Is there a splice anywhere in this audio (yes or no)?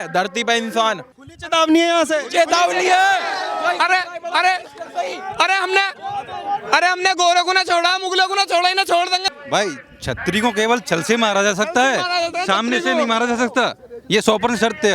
no